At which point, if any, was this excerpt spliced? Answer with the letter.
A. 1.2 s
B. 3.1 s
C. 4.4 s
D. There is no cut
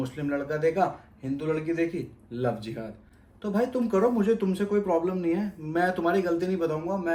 D